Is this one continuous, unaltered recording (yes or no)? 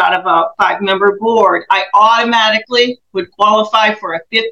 yes